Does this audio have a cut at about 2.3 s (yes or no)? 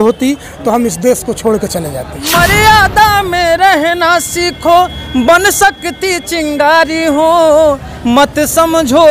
yes